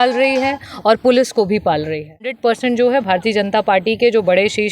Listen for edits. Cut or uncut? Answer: cut